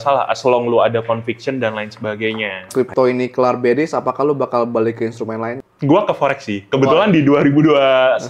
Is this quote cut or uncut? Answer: cut